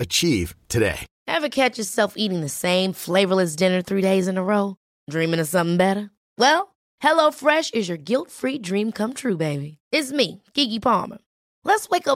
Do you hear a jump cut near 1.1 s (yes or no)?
yes